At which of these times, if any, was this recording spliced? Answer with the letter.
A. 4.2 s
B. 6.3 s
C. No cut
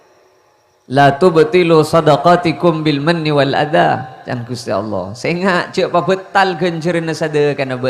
C